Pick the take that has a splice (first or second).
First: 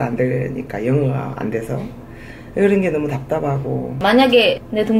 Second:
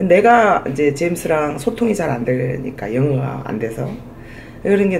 first